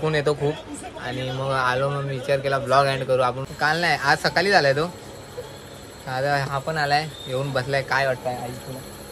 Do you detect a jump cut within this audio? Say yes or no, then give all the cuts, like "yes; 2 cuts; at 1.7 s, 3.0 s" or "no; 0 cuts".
yes; 1 cut; at 3.4 s